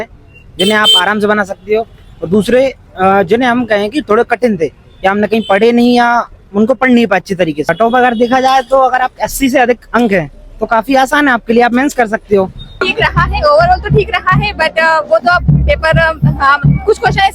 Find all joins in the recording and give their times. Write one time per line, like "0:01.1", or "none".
0:07.7
0:12.8